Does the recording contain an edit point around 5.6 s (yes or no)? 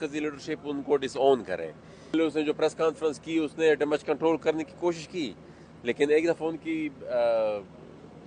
no